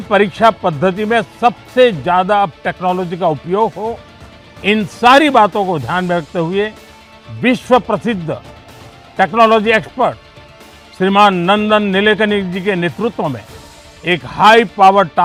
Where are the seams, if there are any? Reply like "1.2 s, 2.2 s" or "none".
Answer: none